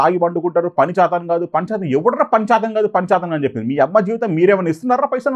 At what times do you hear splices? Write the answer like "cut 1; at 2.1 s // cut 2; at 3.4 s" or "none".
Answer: none